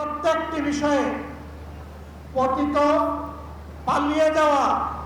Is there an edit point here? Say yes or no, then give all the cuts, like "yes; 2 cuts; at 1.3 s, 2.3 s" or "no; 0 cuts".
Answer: no; 0 cuts